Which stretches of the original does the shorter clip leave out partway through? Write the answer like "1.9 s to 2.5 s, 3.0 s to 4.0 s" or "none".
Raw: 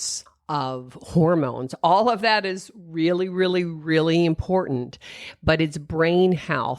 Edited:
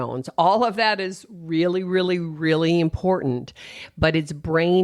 none

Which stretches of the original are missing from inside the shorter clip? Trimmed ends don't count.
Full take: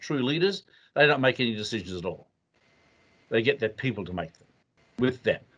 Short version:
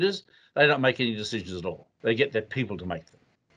2.3 s to 3.1 s

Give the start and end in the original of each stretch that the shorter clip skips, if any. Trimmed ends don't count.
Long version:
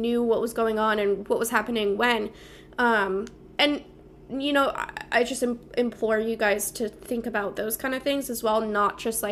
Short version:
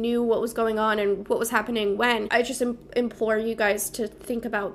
2.3 s to 5.1 s

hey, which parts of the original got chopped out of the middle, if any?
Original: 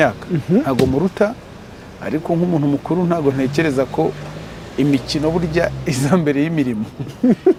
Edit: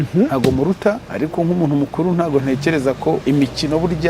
1.4 s to 2.0 s, 4.1 s to 4.7 s

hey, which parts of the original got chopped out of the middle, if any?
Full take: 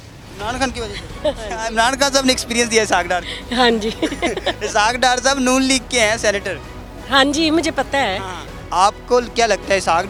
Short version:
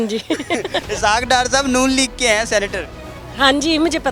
none

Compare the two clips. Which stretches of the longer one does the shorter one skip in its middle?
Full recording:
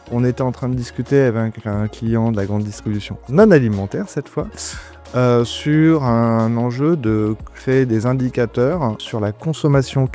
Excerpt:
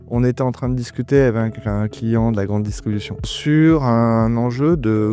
3.3 s to 5.5 s

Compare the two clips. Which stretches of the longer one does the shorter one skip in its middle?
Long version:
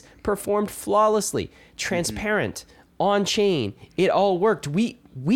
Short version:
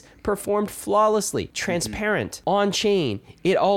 1.9 s to 2.4 s

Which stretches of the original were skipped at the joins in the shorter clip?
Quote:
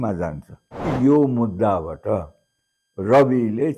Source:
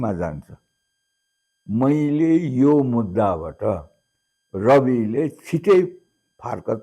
0.9 s to 2.5 s

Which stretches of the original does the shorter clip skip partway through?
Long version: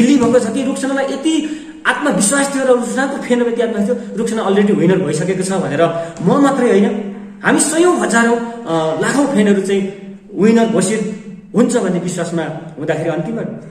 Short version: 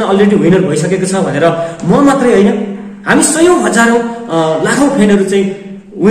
none

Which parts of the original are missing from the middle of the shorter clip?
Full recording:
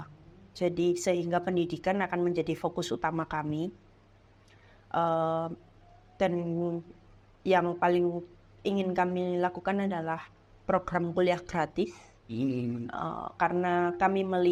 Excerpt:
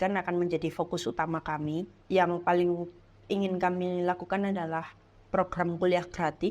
3.8 s to 7.3 s

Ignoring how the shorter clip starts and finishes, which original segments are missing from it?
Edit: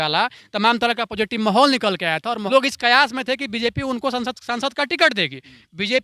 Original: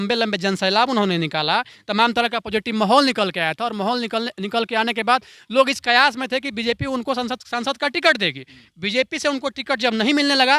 3.8 s to 5.5 s

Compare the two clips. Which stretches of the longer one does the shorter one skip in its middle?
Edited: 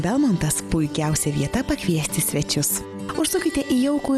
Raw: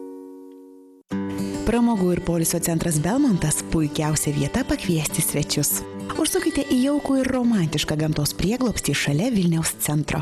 none

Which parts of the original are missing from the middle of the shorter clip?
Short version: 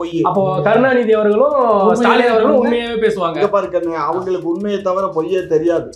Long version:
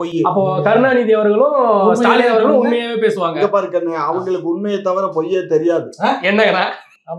none

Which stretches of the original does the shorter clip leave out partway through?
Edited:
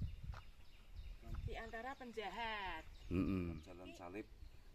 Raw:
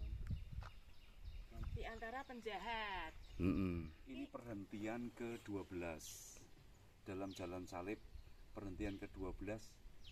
4.0 s to 7.4 s

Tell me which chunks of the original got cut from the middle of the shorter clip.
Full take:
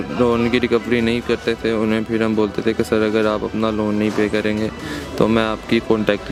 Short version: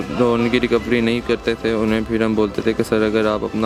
none

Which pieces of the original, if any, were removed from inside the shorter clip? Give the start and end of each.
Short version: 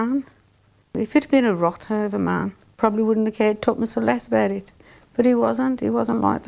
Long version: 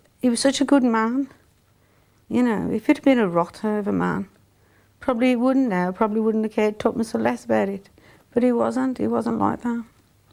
1.9 s to 2.6 s, 4.5 s to 5.9 s

